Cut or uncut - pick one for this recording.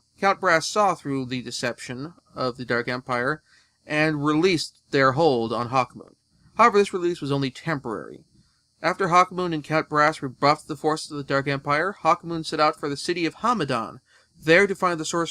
uncut